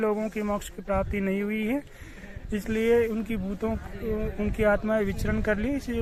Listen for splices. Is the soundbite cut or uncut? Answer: uncut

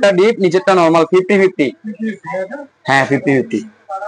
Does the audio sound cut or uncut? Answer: uncut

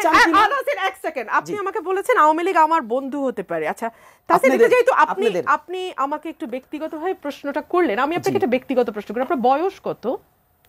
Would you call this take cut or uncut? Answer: uncut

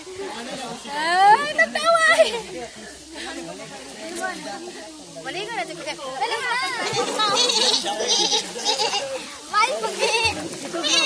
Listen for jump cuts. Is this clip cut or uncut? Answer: cut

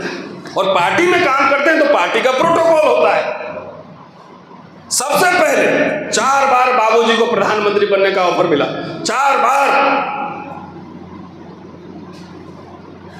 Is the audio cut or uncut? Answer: uncut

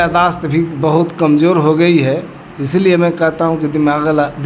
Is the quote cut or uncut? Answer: uncut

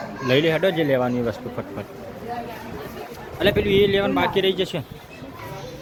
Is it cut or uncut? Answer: uncut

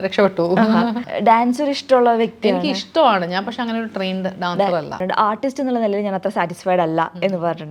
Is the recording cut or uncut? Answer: cut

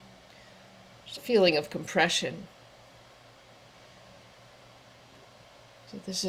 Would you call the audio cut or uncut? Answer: uncut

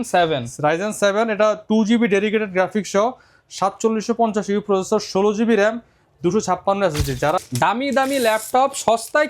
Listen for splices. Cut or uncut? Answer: cut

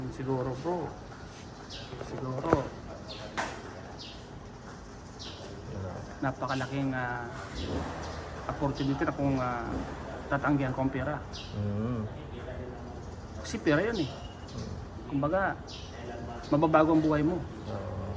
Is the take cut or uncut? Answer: uncut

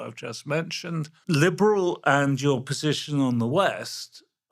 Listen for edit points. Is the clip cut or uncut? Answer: cut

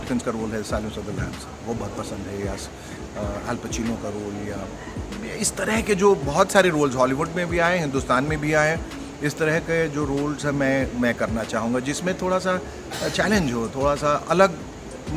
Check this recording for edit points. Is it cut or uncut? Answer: uncut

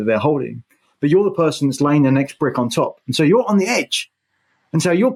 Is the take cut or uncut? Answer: uncut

